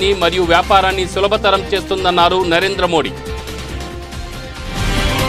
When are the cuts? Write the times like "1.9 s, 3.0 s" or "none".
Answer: none